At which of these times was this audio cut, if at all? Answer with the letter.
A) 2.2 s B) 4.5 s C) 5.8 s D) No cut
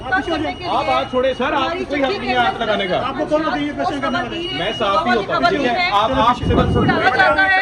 D